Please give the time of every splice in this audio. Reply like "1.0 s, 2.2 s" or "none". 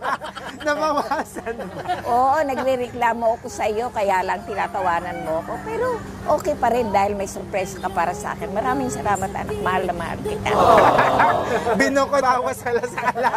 12.2 s